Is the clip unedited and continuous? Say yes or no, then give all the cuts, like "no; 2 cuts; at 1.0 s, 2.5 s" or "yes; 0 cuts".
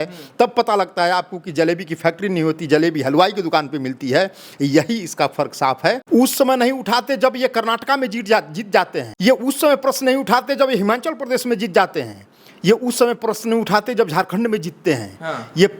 no; 2 cuts; at 6.0 s, 9.0 s